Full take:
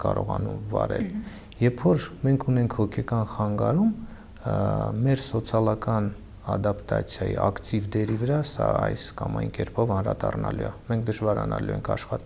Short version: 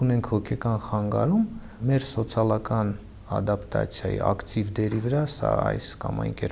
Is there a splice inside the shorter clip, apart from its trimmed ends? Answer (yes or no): yes